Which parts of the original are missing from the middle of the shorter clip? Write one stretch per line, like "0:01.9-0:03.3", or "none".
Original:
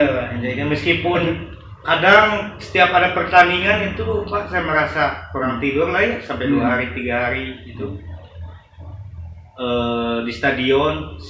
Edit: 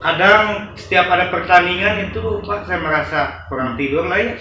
none